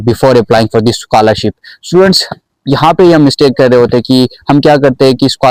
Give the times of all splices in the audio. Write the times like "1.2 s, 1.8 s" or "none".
none